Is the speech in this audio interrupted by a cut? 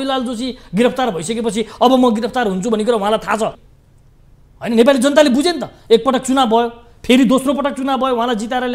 yes; 1 cut; at 3.7 s

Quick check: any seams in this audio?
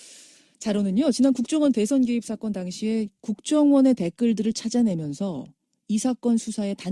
no; 0 cuts

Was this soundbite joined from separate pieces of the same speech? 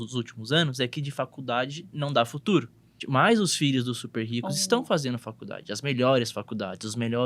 yes; 1 cut; at 3.0 s

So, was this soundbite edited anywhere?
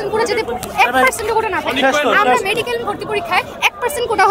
no; 0 cuts

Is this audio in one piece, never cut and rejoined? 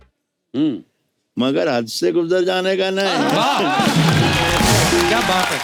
yes; 0 cuts

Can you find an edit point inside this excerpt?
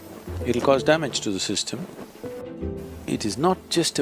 yes; 1 cut; at 2.4 s

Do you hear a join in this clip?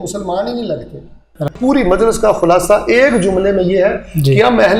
yes; 1 cut; at 1.6 s

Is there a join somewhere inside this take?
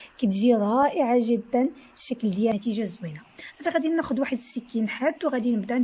yes; 1 cut; at 2.5 s

